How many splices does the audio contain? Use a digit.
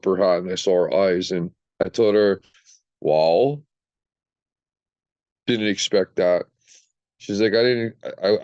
1